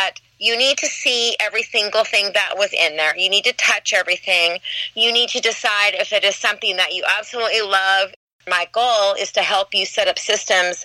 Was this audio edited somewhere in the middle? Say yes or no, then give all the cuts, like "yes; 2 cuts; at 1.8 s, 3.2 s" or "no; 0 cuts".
yes; 1 cut; at 8.5 s